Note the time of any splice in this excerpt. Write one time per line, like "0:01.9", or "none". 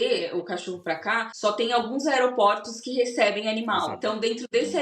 0:01.3
0:03.9